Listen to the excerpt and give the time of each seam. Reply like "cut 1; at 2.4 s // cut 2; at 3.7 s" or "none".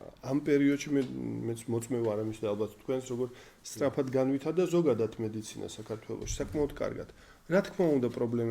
none